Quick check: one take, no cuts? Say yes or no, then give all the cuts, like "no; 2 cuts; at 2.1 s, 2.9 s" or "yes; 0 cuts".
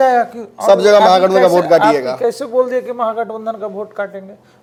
yes; 0 cuts